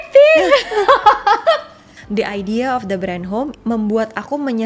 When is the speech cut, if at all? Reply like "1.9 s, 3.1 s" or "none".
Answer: 1.9 s, 3.5 s